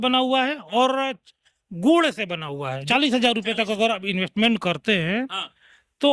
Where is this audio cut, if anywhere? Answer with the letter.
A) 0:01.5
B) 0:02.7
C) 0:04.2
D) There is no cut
B